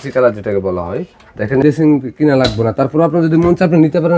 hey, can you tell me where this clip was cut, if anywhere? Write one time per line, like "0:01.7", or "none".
0:01.6